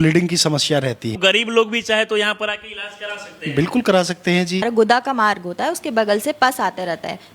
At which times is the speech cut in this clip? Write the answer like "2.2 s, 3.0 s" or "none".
1.2 s, 4.6 s